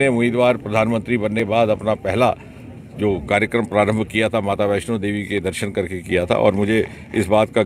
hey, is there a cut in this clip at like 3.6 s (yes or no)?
no